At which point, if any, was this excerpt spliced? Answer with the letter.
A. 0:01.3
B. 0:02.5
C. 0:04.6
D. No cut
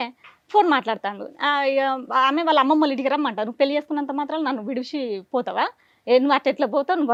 D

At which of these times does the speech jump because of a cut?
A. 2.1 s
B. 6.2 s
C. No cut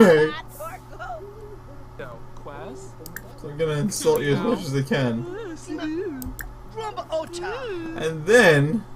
A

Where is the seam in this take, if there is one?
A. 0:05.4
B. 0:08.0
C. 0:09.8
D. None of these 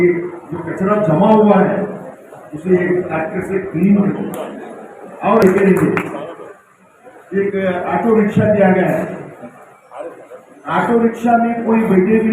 A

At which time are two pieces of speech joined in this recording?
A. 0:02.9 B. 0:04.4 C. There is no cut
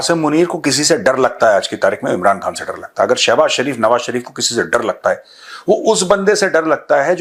C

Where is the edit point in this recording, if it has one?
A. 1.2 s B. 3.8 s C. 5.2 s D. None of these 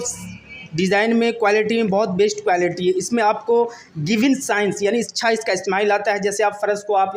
D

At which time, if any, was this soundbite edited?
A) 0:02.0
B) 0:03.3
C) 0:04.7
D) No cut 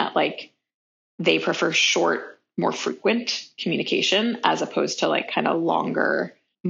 D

